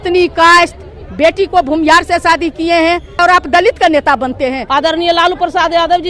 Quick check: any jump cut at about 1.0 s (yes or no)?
no